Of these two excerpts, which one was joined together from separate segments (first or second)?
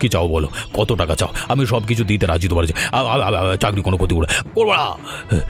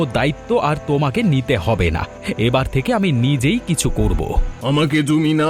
second